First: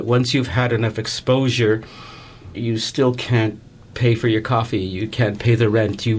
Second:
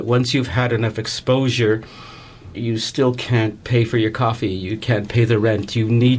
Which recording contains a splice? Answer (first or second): second